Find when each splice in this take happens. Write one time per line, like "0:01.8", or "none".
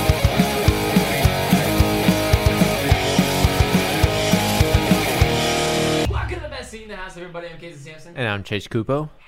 0:06.1
0:08.2

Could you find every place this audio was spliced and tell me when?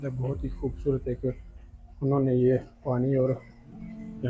none

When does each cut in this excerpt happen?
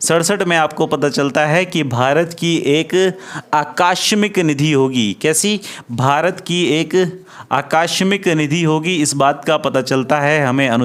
none

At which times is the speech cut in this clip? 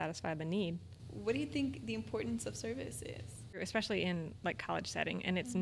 0:00.9
0:03.6

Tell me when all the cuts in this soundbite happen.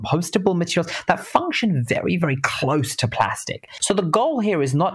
0:03.7

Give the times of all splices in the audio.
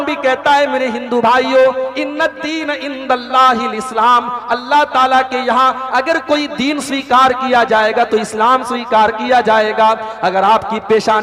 none

